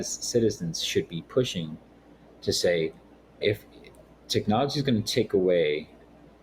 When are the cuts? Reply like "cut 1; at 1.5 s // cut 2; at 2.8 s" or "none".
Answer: none